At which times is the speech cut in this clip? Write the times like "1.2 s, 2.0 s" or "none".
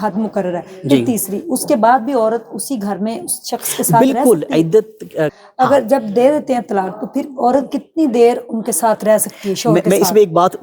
5.4 s